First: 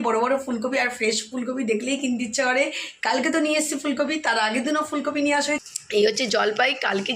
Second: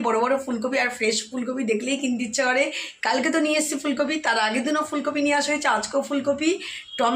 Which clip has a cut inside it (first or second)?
first